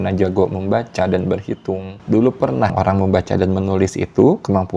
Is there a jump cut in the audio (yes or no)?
yes